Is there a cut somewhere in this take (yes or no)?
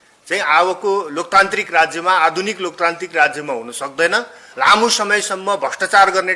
yes